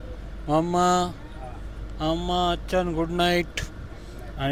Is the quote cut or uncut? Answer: uncut